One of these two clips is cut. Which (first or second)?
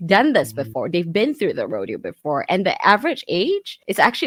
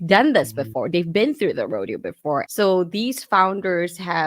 second